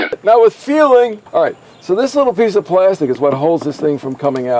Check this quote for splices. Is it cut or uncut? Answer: cut